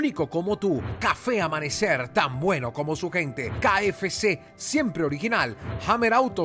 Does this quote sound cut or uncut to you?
uncut